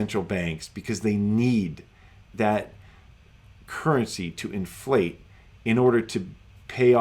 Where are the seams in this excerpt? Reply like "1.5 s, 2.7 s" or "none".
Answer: 2.3 s